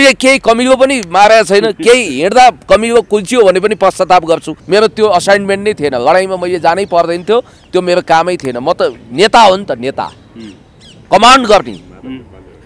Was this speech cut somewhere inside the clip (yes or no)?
yes